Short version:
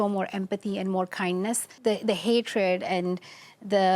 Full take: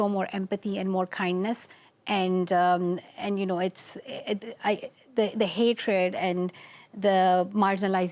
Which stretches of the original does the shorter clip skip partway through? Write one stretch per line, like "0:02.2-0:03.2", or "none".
0:01.7-0:05.0

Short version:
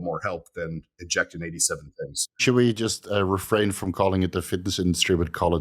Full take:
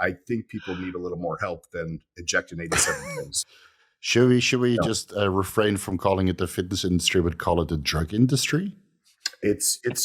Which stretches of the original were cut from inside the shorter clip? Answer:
0:03.6-0:04.5

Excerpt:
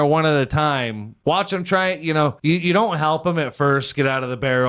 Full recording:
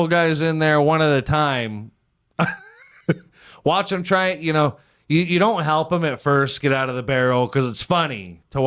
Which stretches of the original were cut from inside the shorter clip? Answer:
0:01.8-0:03.4
0:04.8-0:05.0

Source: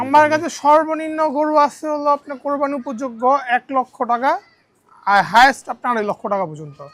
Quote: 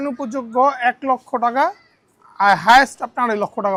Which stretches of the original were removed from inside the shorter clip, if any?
none

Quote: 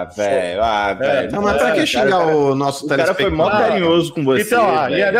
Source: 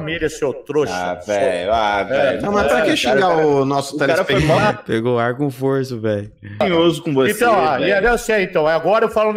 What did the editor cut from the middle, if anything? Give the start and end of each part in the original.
0:04.8-0:06.6

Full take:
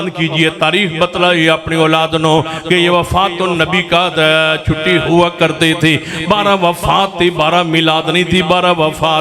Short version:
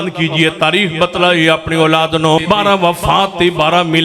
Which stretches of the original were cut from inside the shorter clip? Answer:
0:02.4-0:06.2

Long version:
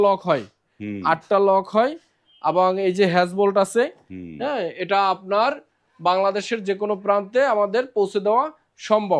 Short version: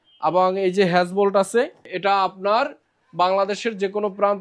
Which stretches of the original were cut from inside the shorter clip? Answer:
0:04.1-0:04.8

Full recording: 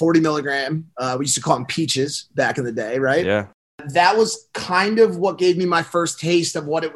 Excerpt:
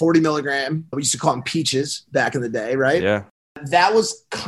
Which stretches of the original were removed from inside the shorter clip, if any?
0:00.9-0:01.1

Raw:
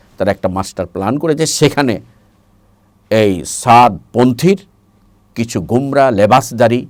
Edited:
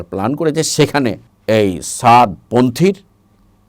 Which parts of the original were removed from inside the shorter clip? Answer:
0:02.1-0:02.9

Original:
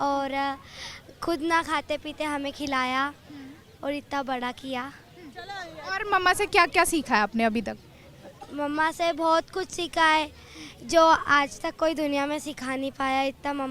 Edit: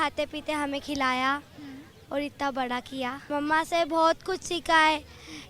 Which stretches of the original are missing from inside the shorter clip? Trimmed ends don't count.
0:04.9-0:08.5

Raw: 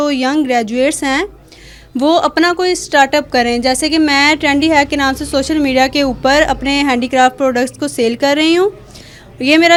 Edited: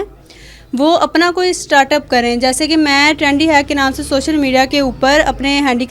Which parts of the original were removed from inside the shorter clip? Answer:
none

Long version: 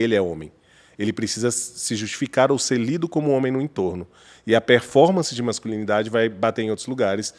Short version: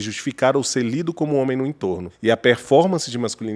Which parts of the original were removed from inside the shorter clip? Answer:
0:04.0-0:04.3

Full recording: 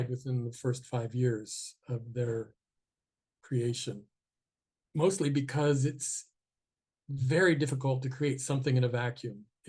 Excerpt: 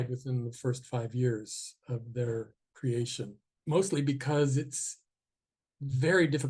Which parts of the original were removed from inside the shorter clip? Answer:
0:02.6-0:03.3
0:04.1-0:04.7

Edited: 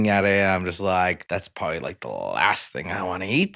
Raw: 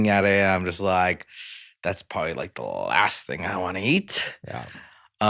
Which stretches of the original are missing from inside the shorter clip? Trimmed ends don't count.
0:01.2-0:01.8

